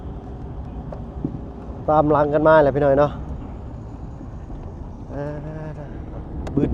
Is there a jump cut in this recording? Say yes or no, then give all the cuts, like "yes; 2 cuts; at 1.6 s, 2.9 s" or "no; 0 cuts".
no; 0 cuts